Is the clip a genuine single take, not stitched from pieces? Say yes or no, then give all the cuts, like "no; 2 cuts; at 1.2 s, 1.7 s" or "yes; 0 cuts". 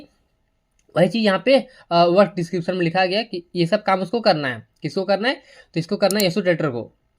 yes; 0 cuts